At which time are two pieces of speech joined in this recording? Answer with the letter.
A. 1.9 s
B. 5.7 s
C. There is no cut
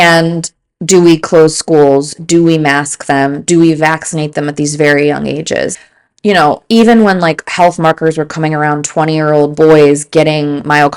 B